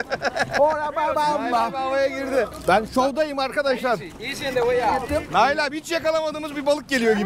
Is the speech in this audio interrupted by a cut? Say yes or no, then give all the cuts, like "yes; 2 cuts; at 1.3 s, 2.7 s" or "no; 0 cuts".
yes; 2 cuts; at 2.5 s, 5.0 s